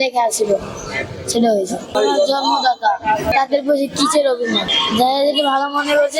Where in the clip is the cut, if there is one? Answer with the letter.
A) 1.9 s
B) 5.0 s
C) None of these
A